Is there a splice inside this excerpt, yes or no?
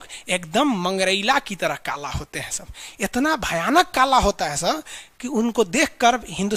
no